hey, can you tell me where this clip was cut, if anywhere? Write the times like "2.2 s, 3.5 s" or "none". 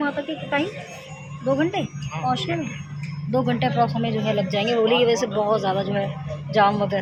none